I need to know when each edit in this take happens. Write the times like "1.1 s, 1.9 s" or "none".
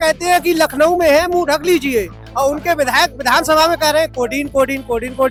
none